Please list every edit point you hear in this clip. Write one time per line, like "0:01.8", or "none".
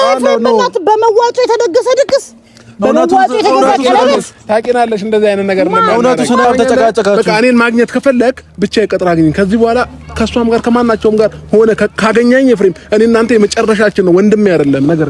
0:06.4